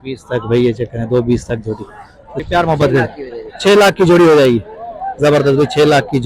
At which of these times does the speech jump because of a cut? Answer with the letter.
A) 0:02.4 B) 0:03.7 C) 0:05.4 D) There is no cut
A